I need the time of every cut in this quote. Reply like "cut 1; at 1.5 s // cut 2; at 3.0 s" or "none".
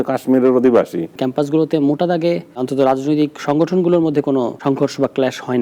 cut 1; at 1.2 s // cut 2; at 2.6 s // cut 3; at 4.6 s